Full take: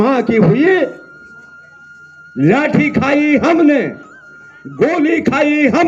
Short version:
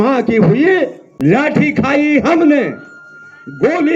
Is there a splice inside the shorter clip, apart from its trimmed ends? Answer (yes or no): yes